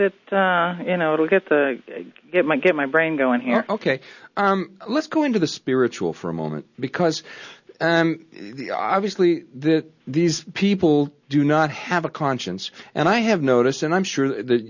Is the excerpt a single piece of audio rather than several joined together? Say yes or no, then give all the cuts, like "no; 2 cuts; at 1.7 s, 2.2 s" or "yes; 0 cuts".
yes; 0 cuts